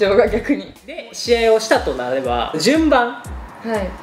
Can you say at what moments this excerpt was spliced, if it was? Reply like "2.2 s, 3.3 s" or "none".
1.0 s